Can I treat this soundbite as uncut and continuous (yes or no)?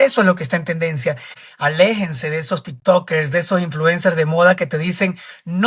no